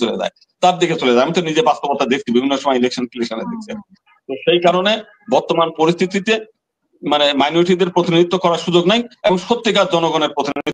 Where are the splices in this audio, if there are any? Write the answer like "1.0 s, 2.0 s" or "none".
none